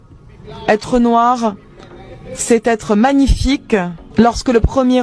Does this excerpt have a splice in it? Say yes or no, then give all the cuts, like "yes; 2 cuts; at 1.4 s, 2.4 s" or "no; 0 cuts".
yes; 1 cut; at 4.0 s